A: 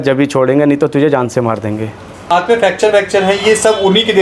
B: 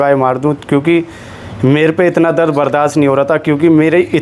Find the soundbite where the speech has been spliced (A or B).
A